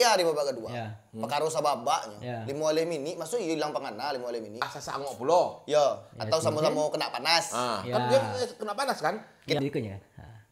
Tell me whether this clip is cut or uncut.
cut